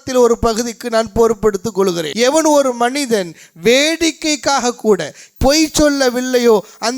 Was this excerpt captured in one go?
no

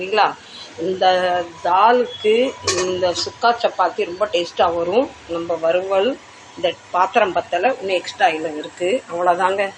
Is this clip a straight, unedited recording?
yes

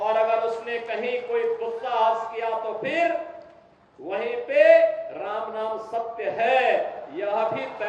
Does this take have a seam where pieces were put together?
no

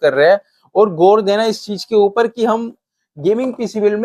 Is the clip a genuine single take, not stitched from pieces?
yes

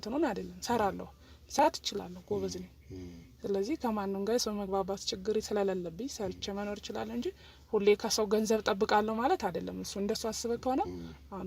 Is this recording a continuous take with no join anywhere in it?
yes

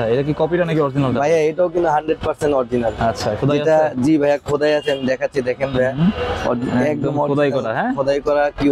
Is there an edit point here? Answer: no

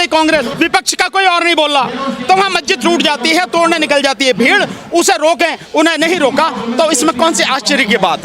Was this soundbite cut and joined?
no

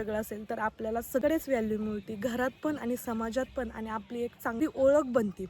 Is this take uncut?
no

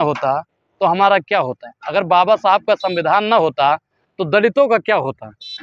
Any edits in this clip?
no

